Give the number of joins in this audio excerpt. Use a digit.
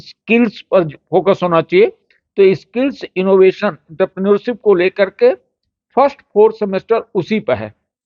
0